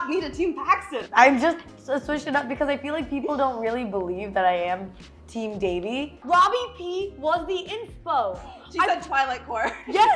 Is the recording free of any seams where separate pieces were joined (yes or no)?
no